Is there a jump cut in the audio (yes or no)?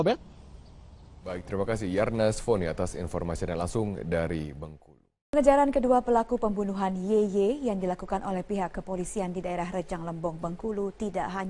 yes